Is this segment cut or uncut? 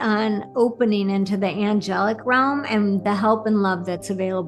uncut